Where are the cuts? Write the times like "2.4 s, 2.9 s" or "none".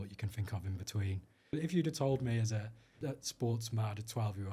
1.5 s, 2.9 s